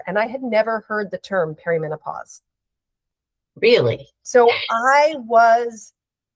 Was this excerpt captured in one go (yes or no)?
yes